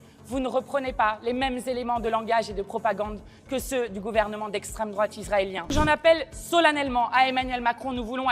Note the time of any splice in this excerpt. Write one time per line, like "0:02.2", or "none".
0:05.7